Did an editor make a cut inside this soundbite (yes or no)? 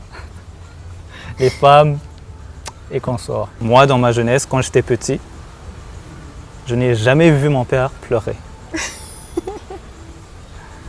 yes